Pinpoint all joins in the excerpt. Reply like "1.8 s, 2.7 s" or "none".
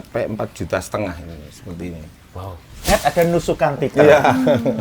2.9 s